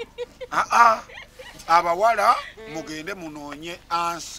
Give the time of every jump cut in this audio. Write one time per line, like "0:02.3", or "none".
none

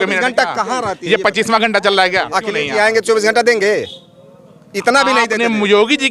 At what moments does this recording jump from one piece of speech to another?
none

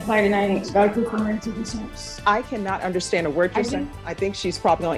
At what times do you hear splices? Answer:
0:03.9

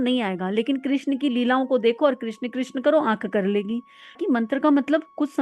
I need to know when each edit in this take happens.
0:04.2

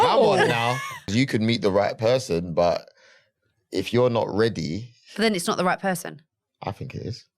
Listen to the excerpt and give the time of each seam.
0:01.1

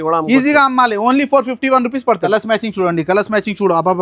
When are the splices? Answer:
0:02.2

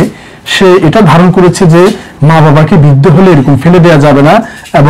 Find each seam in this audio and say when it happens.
none

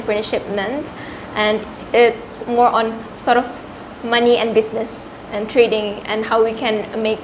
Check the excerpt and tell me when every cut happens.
0:03.1

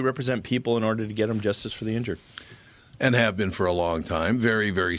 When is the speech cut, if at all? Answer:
none

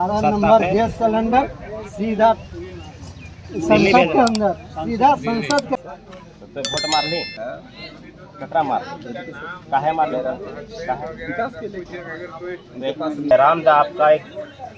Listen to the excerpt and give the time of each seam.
0:05.8
0:13.3

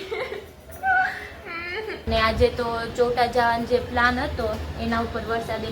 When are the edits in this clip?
0:02.0

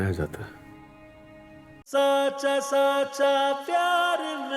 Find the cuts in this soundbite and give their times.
0:01.8

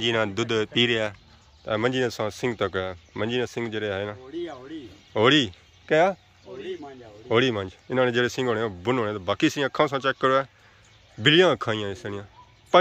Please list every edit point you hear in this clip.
none

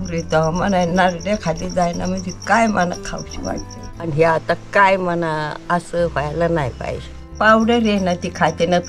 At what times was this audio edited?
0:04.0
0:07.2

